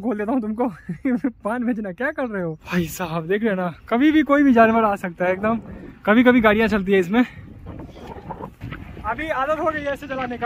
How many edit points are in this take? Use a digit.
2